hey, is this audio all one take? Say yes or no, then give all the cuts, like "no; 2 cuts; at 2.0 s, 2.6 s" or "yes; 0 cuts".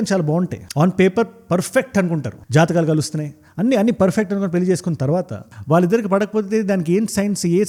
yes; 0 cuts